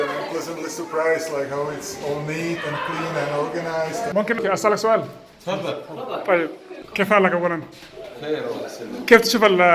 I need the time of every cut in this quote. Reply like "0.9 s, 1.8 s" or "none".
4.1 s